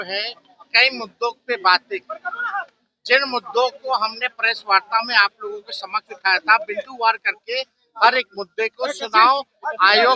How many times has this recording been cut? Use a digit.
0